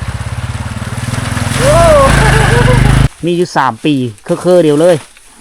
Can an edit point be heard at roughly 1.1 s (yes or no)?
no